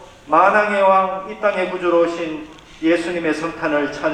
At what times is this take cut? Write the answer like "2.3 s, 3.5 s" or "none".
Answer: none